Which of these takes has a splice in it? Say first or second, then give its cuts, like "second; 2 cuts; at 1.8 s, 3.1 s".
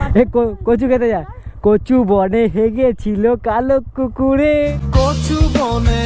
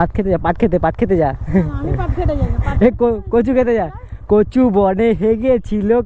first; 1 cut; at 4.7 s